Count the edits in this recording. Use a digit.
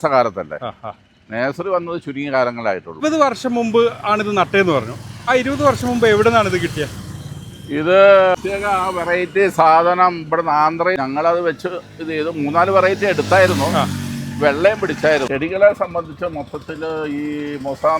4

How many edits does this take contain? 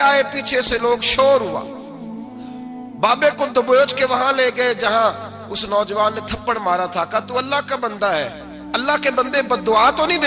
0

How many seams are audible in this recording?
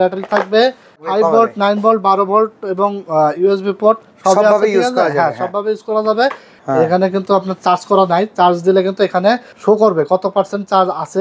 3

